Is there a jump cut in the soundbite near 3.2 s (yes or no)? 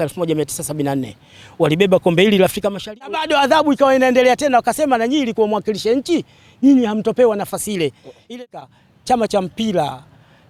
yes